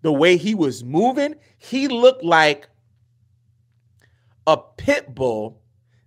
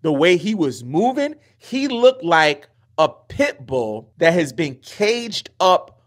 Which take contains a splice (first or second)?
second